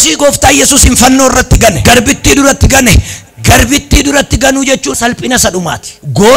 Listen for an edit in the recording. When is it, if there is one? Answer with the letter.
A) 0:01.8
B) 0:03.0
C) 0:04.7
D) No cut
A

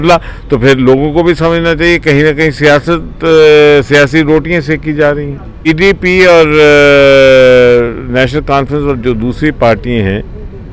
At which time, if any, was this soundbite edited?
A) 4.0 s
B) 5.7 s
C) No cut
B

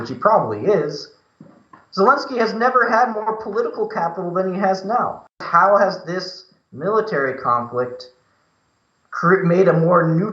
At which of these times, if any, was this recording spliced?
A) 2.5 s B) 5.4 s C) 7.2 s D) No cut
B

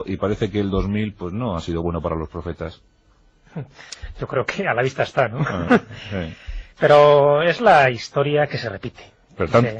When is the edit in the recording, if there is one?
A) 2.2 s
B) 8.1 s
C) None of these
B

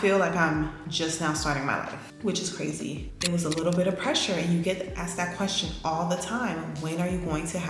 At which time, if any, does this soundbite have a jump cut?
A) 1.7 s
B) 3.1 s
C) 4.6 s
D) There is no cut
B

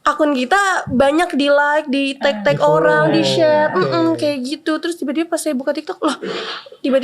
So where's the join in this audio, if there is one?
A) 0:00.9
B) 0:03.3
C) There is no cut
C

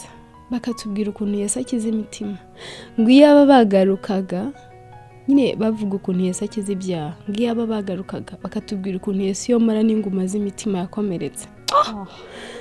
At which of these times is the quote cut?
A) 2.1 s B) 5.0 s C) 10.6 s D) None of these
D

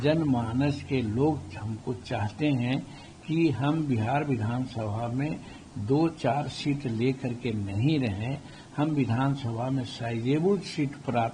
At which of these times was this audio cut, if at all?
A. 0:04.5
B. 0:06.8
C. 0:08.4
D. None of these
D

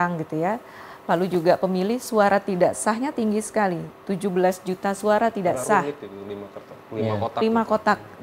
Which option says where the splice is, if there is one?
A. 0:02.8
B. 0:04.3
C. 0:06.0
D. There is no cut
D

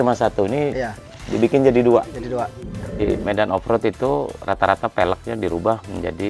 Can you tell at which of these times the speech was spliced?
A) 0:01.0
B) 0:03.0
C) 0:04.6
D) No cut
B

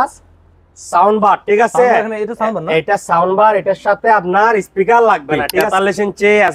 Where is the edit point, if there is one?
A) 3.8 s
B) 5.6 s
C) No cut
B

